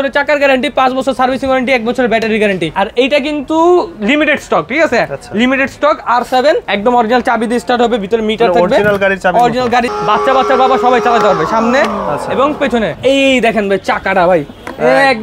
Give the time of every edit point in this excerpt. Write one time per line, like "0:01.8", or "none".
0:02.7
0:06.7
0:09.9
0:13.0

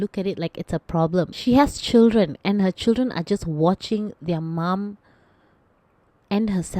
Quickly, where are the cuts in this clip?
0:01.3

